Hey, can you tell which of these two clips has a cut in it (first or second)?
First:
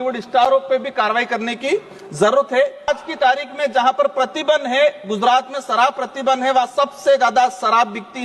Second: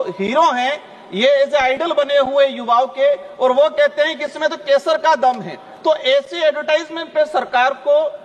first